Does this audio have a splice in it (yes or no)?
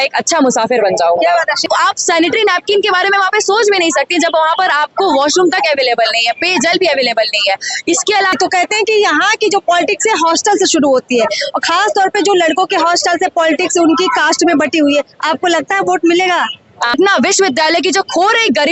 yes